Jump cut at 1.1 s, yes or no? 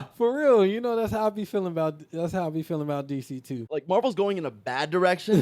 no